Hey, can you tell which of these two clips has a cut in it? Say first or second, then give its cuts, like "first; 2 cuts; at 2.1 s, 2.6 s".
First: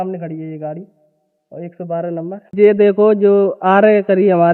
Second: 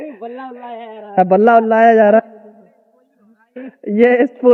first; 1 cut; at 2.5 s